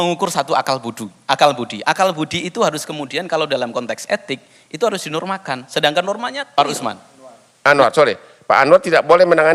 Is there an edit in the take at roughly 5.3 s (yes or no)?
no